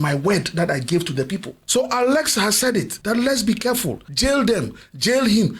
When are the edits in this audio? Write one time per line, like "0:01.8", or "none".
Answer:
0:01.5
0:02.9
0:04.0